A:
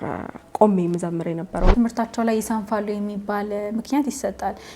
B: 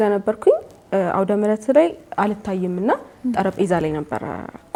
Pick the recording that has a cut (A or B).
A